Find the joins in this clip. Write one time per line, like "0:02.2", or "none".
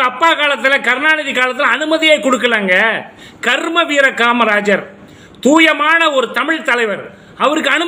none